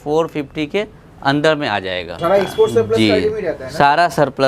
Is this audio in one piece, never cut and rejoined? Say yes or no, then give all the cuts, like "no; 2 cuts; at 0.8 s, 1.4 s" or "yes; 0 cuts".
no; 1 cut; at 2.2 s